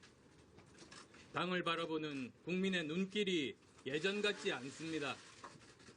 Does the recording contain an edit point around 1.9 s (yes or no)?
yes